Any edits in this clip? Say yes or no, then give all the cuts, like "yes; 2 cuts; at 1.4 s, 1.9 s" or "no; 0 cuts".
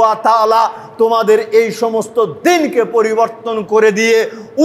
no; 0 cuts